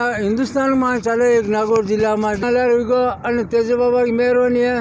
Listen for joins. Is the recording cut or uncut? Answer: cut